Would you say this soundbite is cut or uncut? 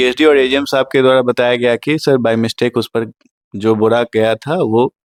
uncut